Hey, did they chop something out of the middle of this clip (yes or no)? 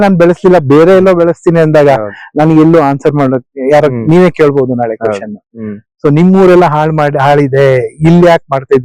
no